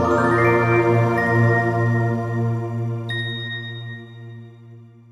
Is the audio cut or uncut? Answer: uncut